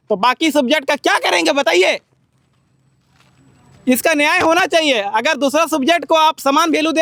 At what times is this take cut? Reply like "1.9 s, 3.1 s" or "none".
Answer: none